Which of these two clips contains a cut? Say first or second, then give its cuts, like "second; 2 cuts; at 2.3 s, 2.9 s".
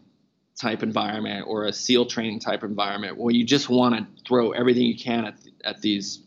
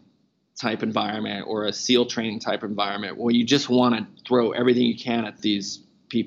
second; 1 cut; at 5.3 s